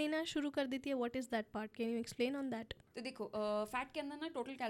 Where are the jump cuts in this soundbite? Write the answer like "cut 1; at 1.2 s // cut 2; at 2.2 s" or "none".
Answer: none